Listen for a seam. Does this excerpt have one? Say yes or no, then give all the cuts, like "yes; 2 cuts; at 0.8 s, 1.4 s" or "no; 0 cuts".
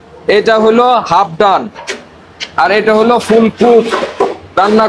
no; 0 cuts